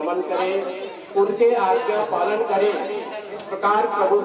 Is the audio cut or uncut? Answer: uncut